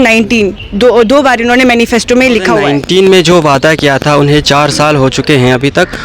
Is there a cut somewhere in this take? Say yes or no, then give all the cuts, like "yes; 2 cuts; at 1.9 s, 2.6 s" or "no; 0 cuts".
yes; 1 cut; at 2.7 s